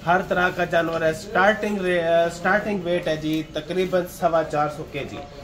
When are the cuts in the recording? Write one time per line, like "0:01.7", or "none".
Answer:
none